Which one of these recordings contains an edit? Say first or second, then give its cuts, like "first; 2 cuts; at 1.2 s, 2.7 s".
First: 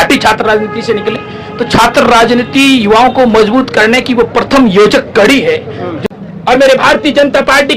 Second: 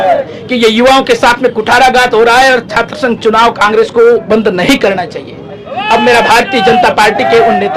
first; 1 cut; at 5.9 s